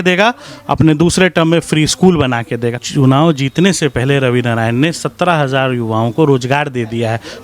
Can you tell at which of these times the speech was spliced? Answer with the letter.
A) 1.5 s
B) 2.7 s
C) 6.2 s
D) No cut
B